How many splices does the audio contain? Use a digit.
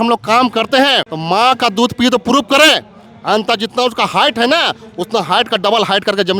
1